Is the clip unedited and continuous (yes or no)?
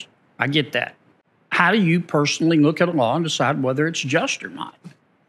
yes